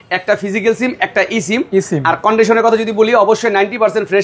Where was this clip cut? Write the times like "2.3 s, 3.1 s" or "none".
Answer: none